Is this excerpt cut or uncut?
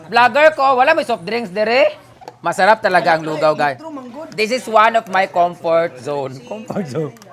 uncut